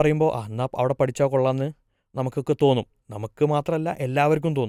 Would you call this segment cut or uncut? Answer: uncut